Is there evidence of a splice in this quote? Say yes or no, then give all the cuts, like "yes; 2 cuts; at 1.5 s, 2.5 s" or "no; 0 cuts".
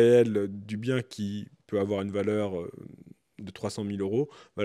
no; 0 cuts